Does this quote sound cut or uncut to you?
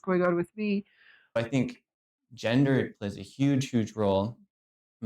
cut